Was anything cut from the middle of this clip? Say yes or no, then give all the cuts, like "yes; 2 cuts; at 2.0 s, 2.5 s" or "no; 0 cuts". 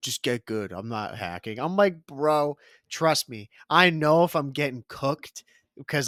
no; 0 cuts